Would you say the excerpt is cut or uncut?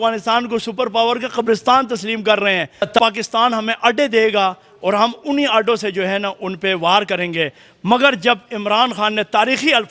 cut